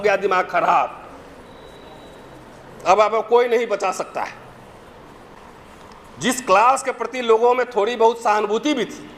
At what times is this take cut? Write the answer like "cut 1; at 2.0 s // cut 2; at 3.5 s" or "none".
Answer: cut 1; at 5.3 s